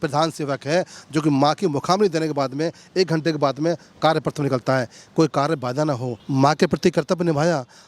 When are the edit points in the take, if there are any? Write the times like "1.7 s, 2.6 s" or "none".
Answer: 6.1 s